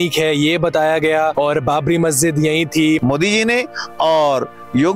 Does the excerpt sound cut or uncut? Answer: cut